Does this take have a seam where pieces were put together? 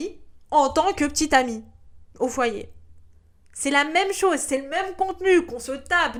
no; 0 cuts

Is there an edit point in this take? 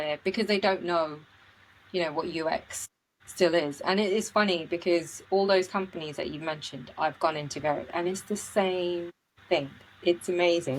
no; 0 cuts

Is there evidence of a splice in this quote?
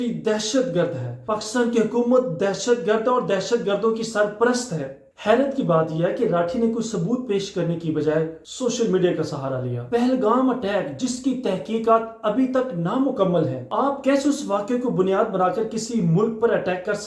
no; 0 cuts

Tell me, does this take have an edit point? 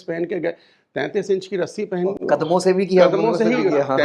no; 0 cuts

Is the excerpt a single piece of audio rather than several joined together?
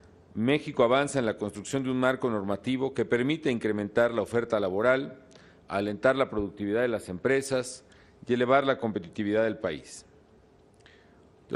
no; 1 cut; at 6.2 s

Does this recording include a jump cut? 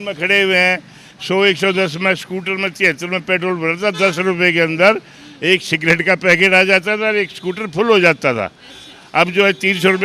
no; 0 cuts

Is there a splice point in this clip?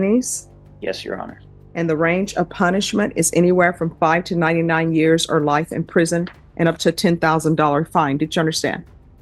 no; 0 cuts

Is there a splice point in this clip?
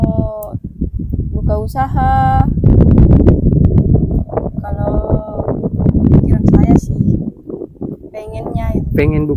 no; 0 cuts

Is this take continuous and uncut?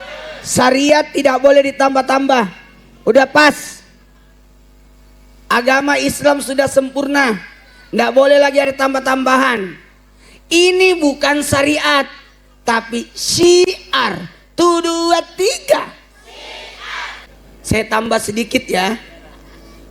no; 1 cut; at 17.2 s

